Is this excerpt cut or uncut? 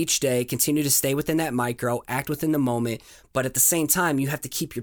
uncut